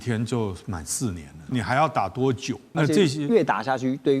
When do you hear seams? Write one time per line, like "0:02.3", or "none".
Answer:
0:01.5
0:02.6